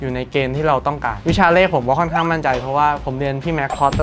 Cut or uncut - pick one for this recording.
cut